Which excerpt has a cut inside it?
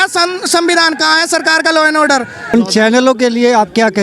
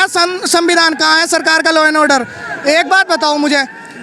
first; 1 cut; at 2.5 s

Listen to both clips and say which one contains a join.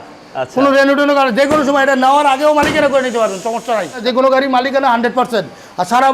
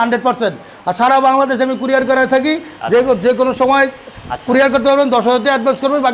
first; 1 cut; at 4.0 s

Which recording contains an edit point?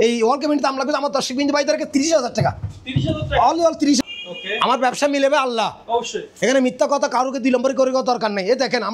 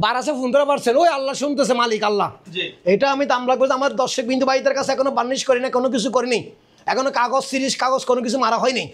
first; 1 cut; at 4.0 s

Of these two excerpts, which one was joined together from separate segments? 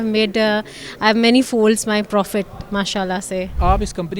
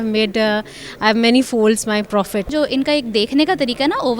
second; 1 cut; at 2.5 s

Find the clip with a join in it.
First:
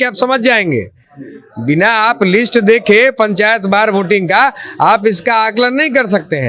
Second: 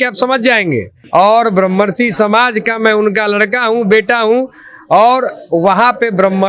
second; 1 cut; at 0.9 s

